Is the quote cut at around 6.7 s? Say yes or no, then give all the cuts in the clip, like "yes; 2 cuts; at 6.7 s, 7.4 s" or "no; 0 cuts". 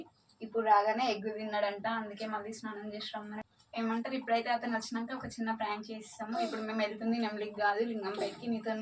no; 1 cut; at 3.4 s